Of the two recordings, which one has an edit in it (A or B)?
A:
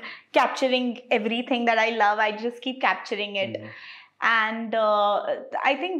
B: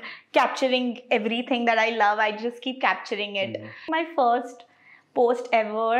B